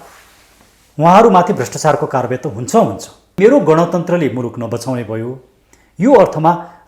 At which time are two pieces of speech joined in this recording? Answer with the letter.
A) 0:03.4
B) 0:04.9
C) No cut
A